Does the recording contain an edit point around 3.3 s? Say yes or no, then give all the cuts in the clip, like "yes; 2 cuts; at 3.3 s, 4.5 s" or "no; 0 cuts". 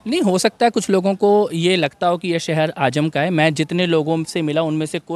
no; 0 cuts